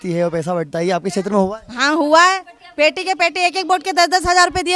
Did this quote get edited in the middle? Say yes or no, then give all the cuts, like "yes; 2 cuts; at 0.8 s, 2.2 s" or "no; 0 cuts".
no; 0 cuts